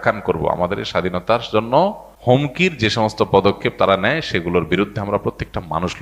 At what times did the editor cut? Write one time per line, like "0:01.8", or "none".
0:02.1